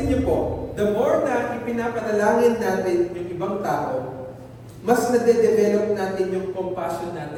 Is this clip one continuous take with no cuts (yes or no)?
yes